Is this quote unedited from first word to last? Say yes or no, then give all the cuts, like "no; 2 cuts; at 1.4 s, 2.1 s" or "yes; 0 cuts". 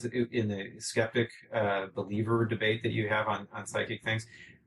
yes; 0 cuts